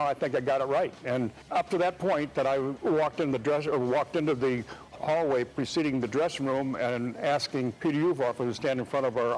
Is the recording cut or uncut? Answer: cut